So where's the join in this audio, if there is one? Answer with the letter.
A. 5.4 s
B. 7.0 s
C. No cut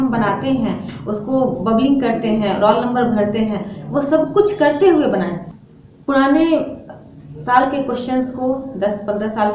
A